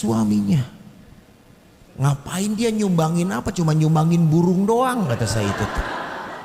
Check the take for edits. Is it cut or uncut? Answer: uncut